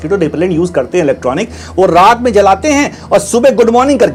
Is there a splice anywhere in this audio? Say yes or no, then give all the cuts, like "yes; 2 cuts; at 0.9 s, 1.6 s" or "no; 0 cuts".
no; 0 cuts